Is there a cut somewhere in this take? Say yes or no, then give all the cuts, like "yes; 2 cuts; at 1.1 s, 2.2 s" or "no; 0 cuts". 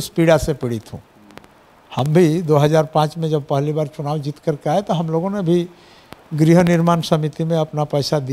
no; 0 cuts